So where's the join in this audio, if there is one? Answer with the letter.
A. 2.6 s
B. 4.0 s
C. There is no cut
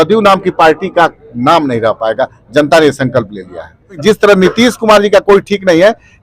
B